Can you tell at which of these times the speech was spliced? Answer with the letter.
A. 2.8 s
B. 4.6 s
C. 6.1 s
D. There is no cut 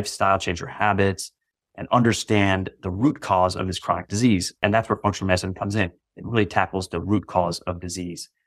B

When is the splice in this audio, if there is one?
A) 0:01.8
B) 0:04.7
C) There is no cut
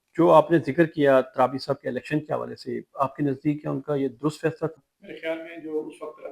B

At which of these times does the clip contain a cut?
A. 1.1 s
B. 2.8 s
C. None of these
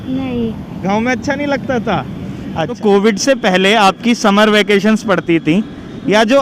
B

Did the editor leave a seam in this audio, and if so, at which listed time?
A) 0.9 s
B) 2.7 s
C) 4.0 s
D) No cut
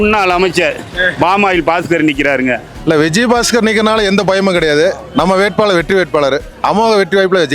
B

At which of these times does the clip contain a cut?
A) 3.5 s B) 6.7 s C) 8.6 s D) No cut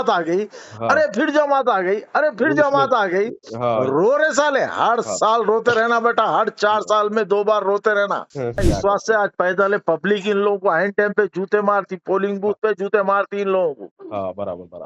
C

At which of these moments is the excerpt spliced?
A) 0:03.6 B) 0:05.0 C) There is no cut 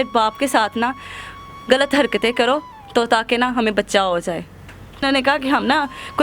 B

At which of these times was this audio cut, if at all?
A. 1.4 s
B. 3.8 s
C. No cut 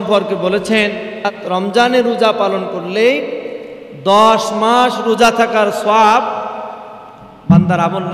A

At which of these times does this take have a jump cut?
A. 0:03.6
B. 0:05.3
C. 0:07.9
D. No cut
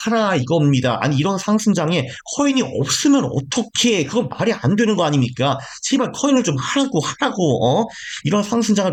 D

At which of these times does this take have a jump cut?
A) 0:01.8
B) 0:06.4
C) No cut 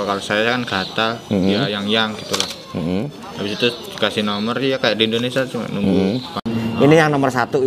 B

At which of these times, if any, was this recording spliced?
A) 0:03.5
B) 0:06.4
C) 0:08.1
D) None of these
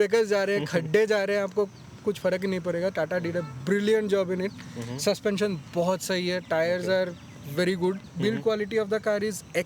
C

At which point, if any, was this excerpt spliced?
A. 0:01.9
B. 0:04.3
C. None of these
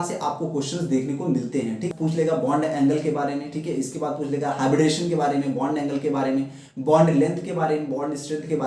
A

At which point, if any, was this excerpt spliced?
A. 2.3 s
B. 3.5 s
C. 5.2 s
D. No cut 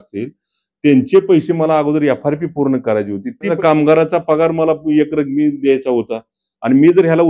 B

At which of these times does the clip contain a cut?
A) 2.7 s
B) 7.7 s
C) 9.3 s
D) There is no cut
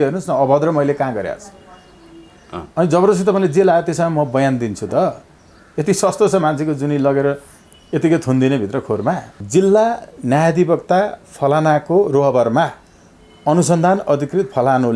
C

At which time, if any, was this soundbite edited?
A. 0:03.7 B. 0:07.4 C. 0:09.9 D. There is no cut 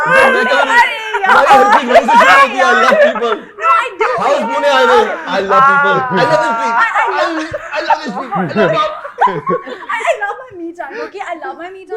D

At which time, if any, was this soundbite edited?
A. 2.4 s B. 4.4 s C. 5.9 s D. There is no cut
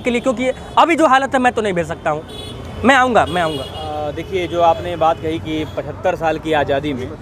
D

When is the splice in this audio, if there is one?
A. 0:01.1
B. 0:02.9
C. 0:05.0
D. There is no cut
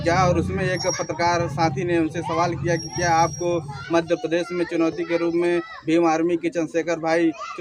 D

